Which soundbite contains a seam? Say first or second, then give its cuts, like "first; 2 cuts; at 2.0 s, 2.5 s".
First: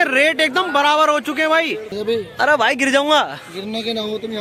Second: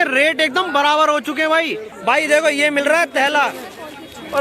second; 1 cut; at 1.9 s